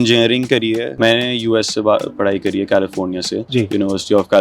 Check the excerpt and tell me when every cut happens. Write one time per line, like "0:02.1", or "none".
0:00.9